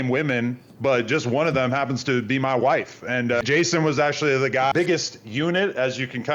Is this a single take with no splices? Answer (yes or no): no